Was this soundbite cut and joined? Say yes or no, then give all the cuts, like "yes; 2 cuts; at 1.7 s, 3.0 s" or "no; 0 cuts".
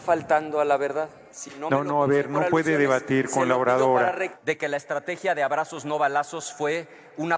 yes; 1 cut; at 4.3 s